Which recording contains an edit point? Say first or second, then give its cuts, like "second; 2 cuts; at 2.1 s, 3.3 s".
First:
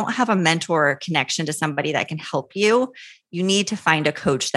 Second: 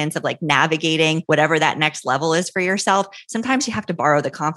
second; 1 cut; at 1.2 s